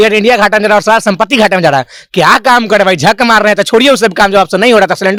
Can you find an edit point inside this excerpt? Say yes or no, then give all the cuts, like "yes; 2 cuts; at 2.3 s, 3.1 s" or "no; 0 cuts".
no; 0 cuts